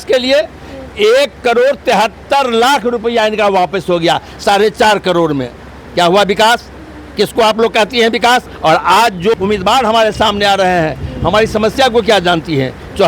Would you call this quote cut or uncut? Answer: cut